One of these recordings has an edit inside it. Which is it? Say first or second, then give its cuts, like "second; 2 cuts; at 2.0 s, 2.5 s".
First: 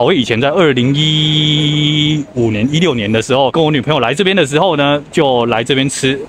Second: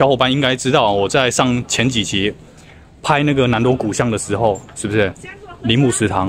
first; 1 cut; at 3.5 s